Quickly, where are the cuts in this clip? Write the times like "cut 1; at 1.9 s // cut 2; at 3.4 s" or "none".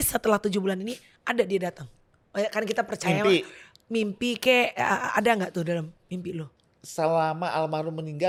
none